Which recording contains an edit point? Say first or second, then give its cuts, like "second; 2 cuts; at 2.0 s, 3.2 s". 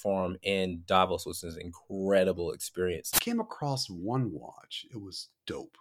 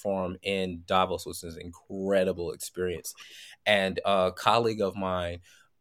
first; 1 cut; at 3.1 s